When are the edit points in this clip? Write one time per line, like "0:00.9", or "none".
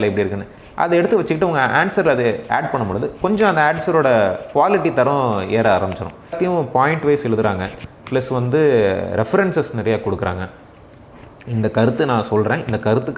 0:06.3